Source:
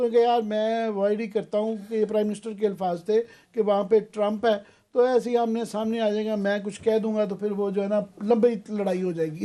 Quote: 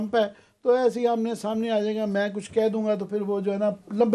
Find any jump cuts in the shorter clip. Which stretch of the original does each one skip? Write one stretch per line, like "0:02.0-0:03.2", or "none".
none